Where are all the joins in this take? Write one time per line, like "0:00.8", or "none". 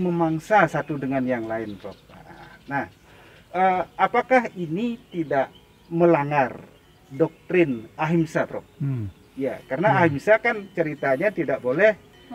none